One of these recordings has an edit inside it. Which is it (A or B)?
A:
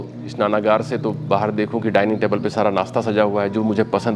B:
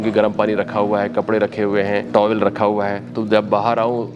B